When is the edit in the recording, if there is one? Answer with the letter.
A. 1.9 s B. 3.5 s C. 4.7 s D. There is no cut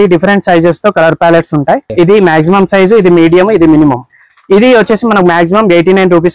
A